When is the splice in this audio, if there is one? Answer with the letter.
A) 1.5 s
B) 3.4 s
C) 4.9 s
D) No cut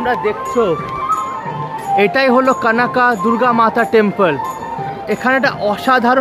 D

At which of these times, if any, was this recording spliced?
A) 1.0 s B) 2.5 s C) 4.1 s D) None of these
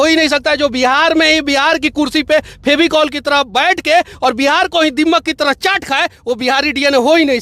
D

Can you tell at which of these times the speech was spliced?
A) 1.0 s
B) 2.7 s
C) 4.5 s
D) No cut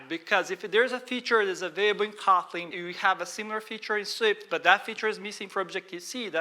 B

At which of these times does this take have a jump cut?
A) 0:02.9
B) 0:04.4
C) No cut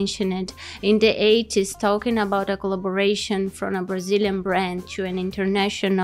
C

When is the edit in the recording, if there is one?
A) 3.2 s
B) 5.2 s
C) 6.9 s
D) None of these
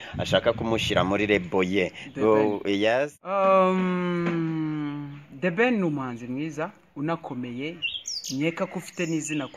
A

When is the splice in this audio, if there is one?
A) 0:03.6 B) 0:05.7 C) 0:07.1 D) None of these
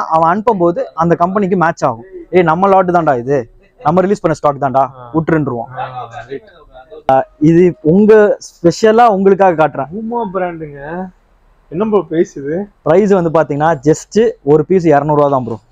C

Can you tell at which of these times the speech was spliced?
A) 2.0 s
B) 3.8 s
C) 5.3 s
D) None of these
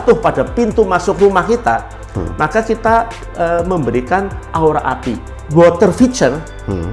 C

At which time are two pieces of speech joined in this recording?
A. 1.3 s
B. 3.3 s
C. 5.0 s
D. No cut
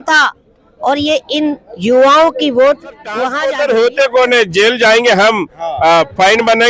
B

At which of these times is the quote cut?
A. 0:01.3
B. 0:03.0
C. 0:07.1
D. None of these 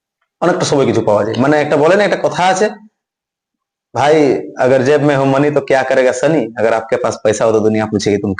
A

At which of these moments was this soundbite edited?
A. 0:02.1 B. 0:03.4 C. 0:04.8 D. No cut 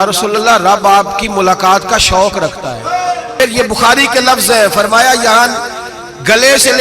B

